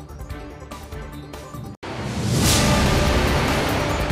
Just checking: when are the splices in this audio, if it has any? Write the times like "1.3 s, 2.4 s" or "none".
1.7 s